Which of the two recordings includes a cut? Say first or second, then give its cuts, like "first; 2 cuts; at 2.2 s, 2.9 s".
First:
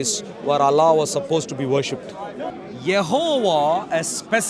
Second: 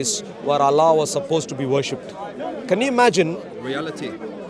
first; 1 cut; at 2.6 s